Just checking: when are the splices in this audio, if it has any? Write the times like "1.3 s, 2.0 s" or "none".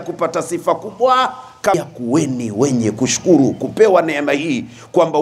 1.7 s